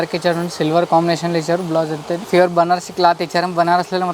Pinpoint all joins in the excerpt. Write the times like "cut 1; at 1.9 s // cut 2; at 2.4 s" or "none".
cut 1; at 2.2 s